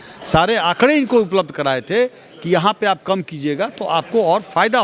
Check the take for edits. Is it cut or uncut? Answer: uncut